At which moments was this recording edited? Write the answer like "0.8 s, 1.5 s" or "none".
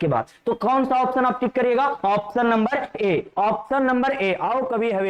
none